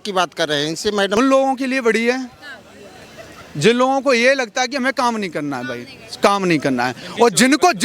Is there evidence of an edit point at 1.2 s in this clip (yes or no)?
yes